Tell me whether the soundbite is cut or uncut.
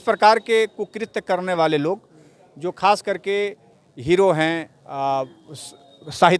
cut